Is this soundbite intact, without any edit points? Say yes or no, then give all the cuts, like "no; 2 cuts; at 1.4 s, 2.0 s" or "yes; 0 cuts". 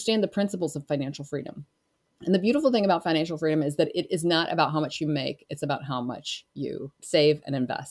no; 1 cut; at 7.0 s